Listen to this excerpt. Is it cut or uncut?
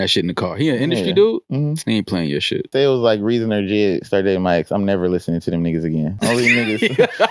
cut